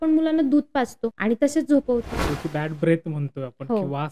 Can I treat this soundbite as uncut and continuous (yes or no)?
no